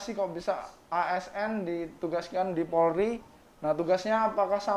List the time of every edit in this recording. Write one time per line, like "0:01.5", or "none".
none